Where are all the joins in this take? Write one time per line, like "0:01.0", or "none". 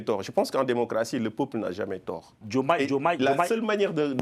0:02.4